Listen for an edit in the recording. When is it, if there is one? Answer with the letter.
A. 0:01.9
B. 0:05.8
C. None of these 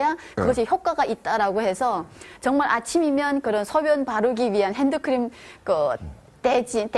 B